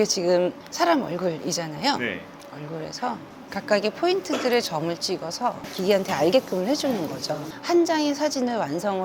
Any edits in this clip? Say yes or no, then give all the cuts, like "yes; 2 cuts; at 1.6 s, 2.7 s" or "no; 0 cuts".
yes; 3 cuts; at 2.3 s, 5.7 s, 7.5 s